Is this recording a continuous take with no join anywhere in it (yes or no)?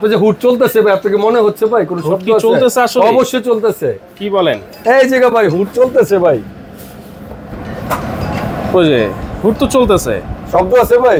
yes